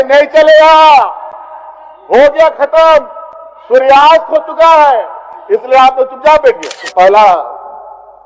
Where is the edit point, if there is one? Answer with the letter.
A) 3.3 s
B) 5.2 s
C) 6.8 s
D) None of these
C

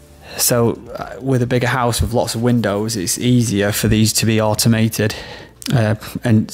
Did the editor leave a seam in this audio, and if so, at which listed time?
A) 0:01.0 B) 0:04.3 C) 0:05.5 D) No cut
C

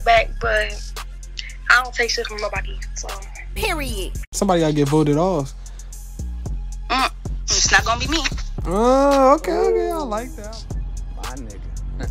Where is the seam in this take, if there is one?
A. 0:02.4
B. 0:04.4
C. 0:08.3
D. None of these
B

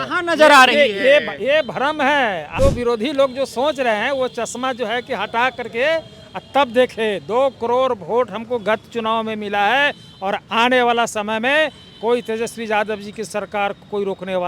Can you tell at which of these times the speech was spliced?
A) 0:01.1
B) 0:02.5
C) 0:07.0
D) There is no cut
B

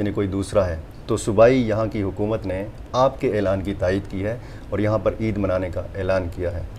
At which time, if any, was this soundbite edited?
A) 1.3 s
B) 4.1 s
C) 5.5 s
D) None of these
D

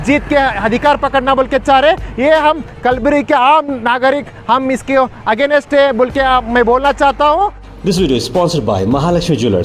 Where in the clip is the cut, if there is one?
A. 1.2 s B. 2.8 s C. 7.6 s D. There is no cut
C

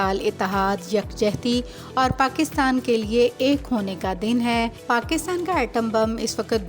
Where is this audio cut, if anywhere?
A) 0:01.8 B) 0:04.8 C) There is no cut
B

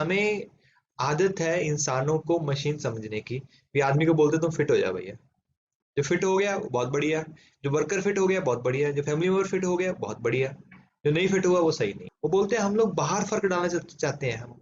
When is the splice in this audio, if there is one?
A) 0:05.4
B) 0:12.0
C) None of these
B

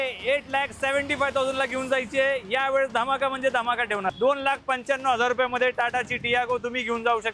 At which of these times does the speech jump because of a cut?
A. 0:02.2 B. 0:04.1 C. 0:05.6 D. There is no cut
B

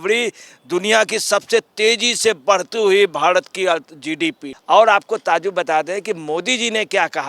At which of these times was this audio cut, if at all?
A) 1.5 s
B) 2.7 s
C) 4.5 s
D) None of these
C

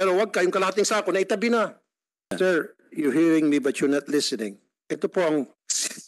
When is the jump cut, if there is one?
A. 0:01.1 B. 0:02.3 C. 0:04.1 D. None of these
B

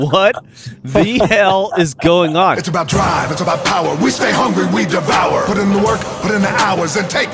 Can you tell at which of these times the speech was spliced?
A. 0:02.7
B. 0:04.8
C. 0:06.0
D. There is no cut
A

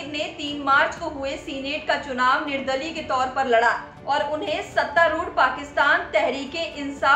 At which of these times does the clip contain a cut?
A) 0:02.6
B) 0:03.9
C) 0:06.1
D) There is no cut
B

